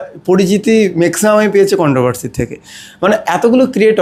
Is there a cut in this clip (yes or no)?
no